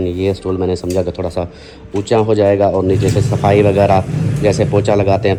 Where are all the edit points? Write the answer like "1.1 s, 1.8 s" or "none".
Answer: none